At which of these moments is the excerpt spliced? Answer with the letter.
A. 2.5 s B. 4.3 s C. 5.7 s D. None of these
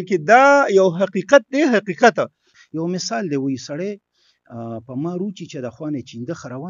A